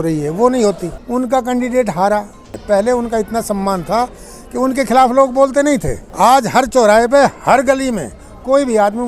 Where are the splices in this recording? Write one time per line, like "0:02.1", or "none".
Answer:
0:00.9
0:02.6
0:06.0